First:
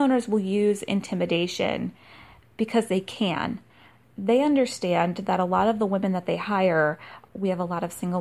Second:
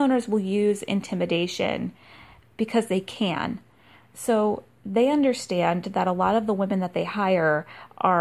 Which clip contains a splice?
first; 2 cuts; at 4.1 s, 7.2 s

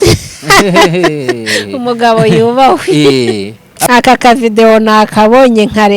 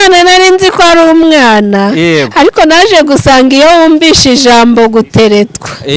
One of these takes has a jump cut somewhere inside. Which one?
first; 1 cut; at 3.7 s

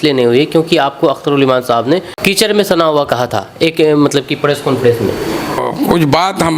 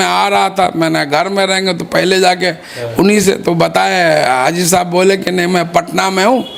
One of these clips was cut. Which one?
first; 2 cuts; at 2.1 s, 5.6 s

